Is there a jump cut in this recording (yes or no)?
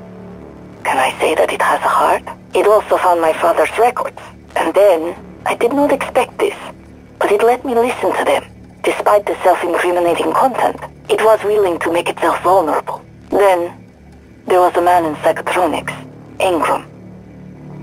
yes